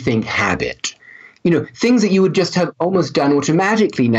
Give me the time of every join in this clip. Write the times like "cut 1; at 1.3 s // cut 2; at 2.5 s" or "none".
cut 1; at 1.3 s